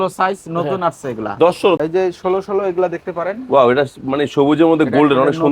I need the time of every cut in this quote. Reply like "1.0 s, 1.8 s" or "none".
1.8 s